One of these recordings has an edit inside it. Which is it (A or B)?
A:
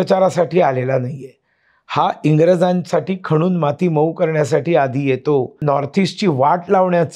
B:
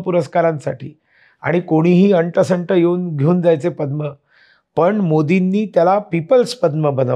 A